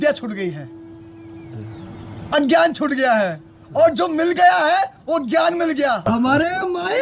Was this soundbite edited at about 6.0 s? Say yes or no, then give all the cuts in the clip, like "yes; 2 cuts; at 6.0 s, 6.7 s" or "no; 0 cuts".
yes; 1 cut; at 6.0 s